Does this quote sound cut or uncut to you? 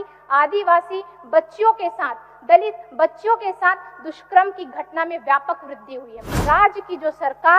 cut